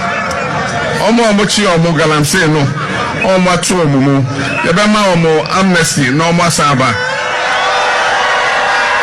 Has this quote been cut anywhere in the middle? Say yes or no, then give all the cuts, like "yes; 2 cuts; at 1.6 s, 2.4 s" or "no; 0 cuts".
no; 0 cuts